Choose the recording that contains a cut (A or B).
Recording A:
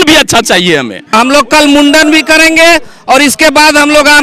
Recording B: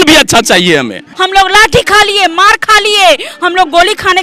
B